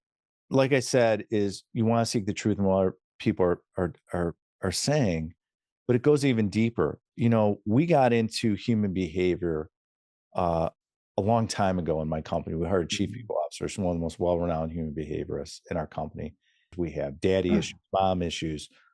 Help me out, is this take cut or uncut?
cut